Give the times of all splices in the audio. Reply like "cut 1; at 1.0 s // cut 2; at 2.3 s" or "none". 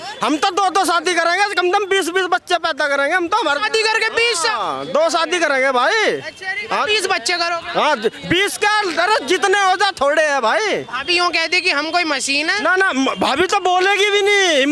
none

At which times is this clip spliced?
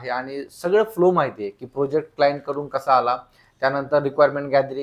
none

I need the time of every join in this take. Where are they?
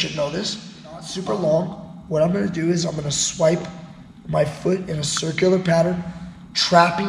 cut 1; at 1.1 s

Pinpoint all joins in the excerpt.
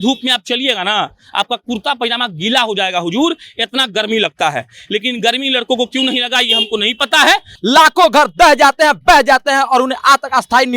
cut 1; at 7.5 s

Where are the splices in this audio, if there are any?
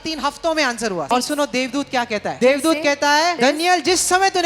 cut 1; at 1.1 s // cut 2; at 2.4 s // cut 3; at 3.4 s

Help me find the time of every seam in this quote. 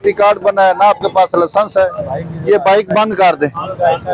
none

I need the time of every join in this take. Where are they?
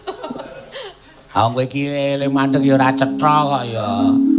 none

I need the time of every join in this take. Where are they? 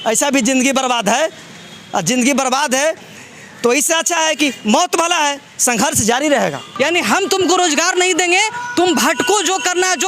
cut 1; at 6.6 s

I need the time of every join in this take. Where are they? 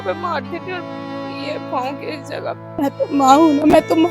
cut 1; at 2.8 s

